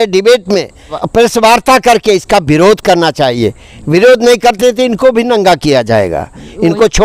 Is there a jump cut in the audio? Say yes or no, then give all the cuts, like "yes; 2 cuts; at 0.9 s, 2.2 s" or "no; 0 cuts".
yes; 1 cut; at 1.0 s